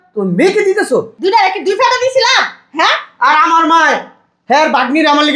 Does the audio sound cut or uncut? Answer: cut